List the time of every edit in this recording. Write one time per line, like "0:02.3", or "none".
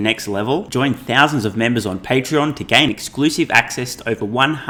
none